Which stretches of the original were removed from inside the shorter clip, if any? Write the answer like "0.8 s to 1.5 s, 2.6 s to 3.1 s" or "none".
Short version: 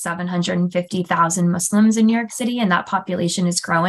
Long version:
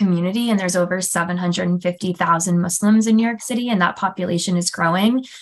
none